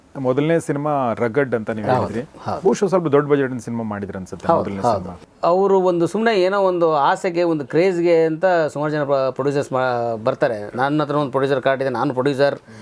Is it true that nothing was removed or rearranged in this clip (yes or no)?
no